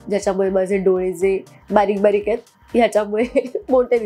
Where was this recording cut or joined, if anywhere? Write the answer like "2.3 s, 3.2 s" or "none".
none